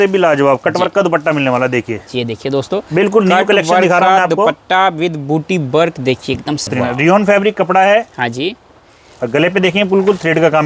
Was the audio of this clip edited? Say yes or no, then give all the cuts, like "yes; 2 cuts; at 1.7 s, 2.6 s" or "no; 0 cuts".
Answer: yes; 1 cut; at 6.7 s